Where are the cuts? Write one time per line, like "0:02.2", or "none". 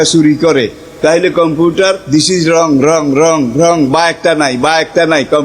0:02.0